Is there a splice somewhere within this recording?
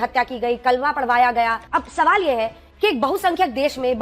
yes; 1 cut; at 1.6 s

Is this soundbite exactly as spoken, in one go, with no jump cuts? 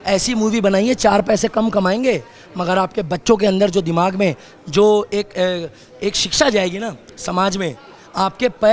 yes; 0 cuts

